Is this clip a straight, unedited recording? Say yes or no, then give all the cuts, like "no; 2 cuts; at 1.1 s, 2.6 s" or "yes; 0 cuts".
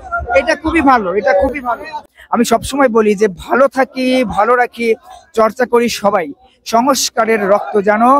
no; 1 cut; at 2.0 s